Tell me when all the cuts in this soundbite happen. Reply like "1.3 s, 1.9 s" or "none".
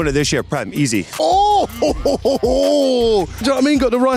1.1 s, 3.4 s